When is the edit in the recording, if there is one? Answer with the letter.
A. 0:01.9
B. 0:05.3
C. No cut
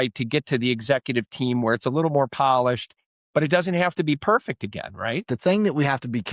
B